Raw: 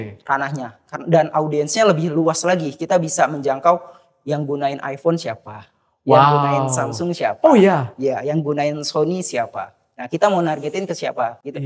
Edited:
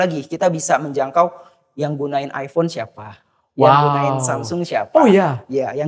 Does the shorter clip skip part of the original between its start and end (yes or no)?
no